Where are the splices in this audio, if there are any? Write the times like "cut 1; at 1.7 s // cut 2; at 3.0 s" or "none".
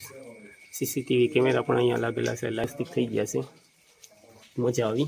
cut 1; at 2.6 s